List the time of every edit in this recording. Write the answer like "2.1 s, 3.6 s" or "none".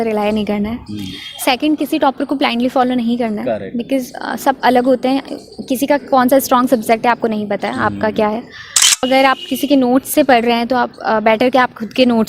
9.0 s